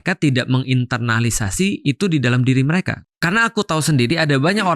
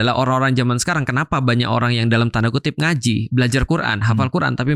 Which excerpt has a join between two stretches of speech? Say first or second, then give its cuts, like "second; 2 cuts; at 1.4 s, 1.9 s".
first; 1 cut; at 2.9 s